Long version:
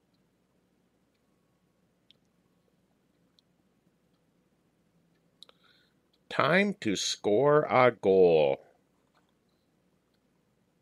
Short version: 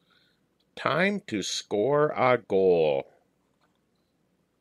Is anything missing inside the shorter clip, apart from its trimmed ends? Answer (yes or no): no